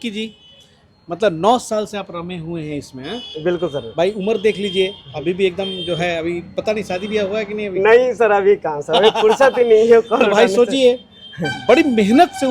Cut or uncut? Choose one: uncut